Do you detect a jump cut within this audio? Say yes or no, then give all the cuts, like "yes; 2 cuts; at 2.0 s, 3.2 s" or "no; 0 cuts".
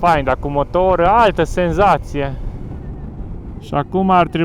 yes; 1 cut; at 2.8 s